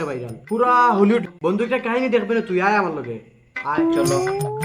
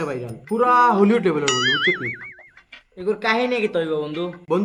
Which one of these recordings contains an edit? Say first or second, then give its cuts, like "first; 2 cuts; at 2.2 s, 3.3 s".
first; 1 cut; at 1.2 s